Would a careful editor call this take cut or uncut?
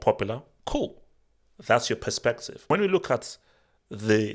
cut